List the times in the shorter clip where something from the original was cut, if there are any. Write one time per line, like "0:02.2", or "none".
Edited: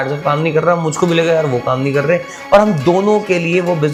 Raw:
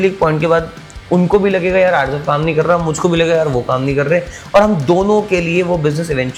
none